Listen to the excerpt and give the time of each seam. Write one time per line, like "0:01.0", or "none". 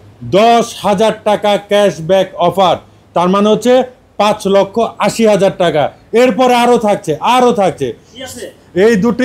none